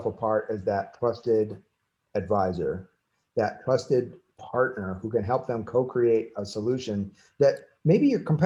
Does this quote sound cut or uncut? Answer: uncut